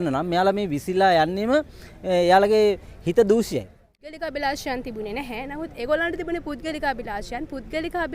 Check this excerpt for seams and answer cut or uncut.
cut